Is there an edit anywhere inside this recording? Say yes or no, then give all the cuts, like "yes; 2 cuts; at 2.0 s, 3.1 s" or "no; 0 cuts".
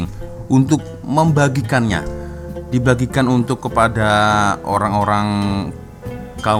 no; 0 cuts